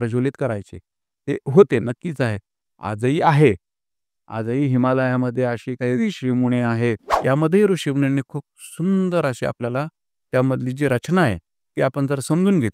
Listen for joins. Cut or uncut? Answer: cut